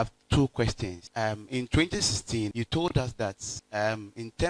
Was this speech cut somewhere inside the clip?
yes; 3 cuts; at 1.0 s, 2.5 s, 3.5 s

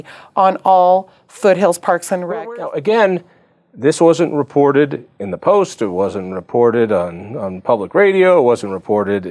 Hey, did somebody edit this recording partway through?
yes; 1 cut; at 2.3 s

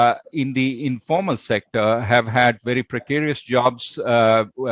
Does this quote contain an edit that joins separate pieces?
no; 0 cuts

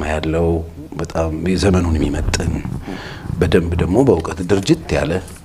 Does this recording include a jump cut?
no; 0 cuts

